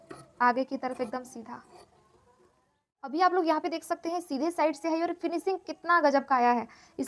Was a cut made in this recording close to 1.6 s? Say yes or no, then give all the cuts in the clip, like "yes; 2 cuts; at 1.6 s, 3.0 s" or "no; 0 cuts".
no; 1 cut; at 3.1 s